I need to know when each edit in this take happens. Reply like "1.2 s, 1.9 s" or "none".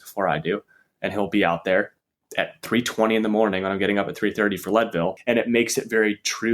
5.2 s